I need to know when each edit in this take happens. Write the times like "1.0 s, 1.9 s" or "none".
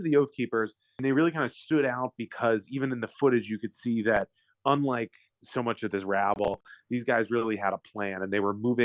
1.0 s